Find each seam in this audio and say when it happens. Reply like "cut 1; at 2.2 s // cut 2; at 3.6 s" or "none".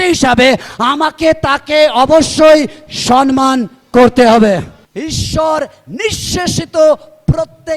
cut 1; at 4.8 s